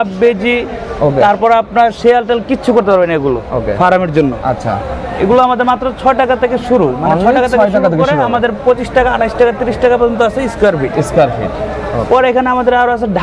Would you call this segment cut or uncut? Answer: uncut